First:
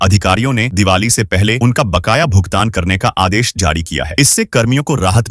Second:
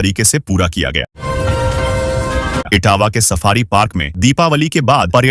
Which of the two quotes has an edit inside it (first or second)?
second